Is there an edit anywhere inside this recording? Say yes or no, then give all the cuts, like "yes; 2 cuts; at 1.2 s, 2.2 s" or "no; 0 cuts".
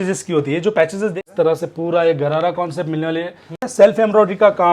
yes; 2 cuts; at 1.2 s, 3.7 s